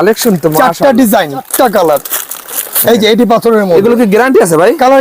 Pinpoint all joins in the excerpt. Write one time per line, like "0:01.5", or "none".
0:01.5